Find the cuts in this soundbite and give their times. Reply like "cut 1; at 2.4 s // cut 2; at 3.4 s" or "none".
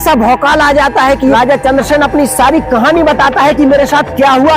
cut 1; at 1.2 s

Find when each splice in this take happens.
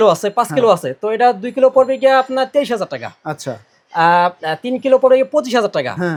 none

